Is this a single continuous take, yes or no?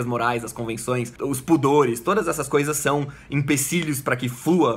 no